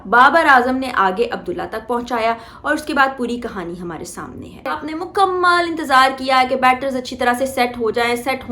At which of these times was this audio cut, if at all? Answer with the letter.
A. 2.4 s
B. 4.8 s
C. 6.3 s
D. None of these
B